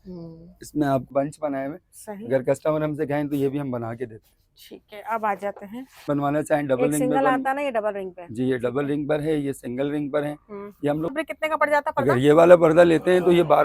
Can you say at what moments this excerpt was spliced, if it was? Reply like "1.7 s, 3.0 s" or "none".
1.1 s, 6.1 s, 11.1 s